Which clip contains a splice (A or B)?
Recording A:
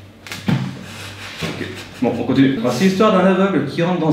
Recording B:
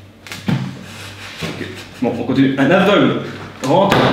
A